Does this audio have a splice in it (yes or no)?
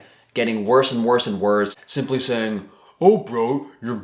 yes